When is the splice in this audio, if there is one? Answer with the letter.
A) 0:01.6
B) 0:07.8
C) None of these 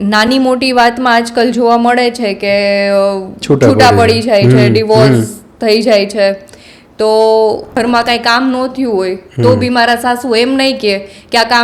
B